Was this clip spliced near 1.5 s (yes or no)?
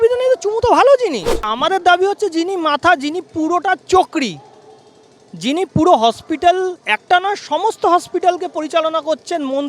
yes